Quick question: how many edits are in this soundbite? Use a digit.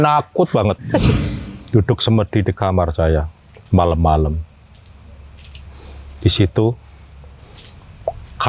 1